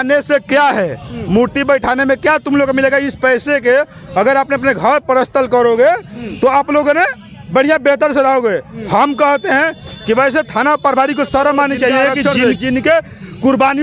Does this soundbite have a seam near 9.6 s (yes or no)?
no